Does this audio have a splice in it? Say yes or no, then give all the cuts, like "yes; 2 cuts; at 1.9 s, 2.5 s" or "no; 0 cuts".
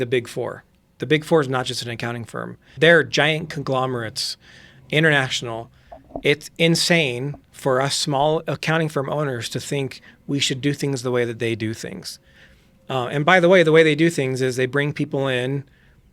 yes; 2 cuts; at 0.9 s, 2.8 s